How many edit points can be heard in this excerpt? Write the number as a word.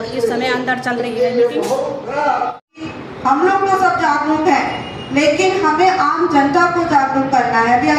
one